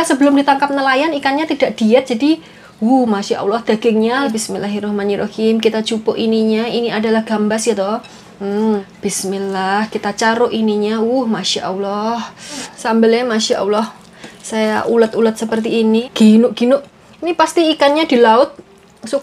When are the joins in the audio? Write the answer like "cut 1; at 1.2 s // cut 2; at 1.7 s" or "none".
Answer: cut 1; at 4.4 s // cut 2; at 8.9 s // cut 3; at 12.7 s // cut 4; at 16.1 s